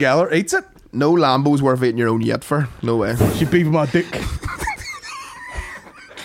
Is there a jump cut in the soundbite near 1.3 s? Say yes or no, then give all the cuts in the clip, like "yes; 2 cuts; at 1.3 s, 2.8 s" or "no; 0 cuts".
no; 1 cut; at 3.2 s